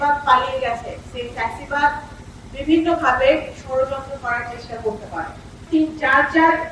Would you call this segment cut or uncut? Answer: cut